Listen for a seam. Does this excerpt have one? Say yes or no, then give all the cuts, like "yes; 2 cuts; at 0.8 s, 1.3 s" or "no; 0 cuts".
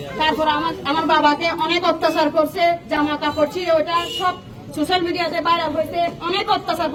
no; 0 cuts